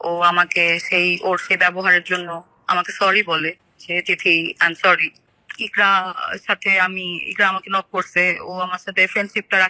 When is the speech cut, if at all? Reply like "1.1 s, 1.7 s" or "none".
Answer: 5.3 s